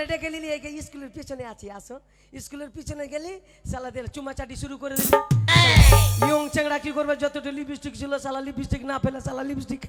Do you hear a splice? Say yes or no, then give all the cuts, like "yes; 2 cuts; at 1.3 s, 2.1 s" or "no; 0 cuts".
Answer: no; 0 cuts